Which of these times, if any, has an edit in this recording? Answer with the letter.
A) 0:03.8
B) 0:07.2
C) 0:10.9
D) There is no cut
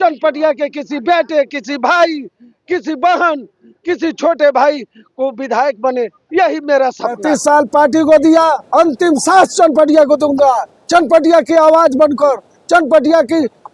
B